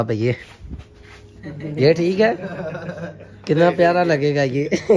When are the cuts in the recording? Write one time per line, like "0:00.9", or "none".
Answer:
0:02.8